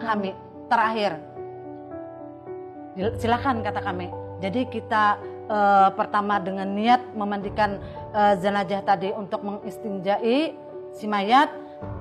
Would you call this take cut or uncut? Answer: uncut